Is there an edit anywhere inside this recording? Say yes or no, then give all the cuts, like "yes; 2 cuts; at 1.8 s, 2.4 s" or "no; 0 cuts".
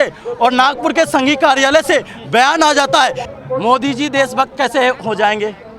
yes; 1 cut; at 3.2 s